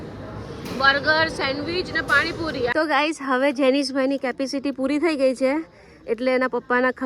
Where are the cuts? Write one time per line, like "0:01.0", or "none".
0:02.7